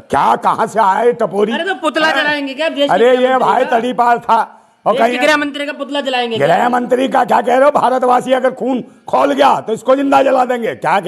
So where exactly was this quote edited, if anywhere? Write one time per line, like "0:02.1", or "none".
none